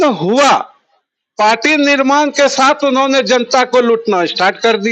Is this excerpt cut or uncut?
uncut